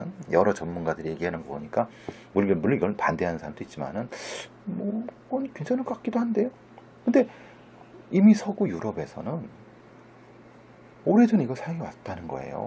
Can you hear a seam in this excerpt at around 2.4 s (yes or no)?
no